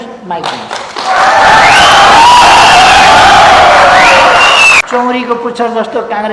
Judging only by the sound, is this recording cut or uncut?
cut